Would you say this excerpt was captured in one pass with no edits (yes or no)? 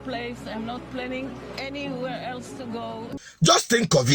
no